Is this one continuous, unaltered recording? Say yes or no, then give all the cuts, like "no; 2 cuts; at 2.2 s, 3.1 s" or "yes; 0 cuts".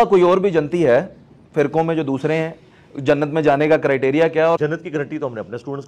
no; 1 cut; at 4.6 s